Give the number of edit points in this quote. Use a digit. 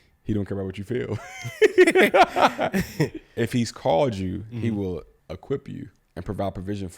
2